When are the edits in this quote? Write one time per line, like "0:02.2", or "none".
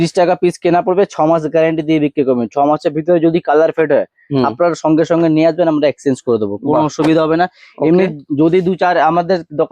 none